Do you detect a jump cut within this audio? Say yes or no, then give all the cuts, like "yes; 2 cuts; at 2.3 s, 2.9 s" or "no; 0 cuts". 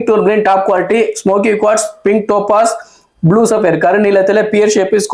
no; 0 cuts